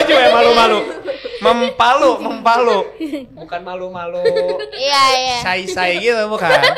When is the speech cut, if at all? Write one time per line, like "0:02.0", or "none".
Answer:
none